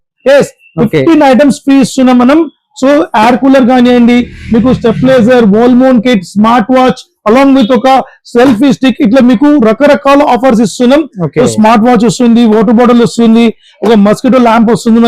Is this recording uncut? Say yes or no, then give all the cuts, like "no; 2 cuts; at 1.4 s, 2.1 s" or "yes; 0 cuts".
yes; 0 cuts